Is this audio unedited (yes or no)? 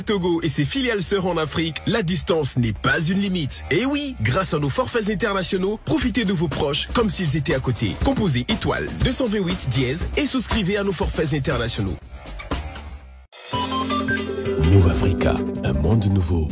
yes